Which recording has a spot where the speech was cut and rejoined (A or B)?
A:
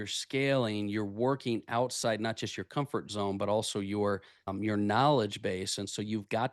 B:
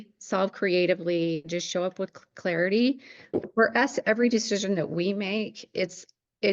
B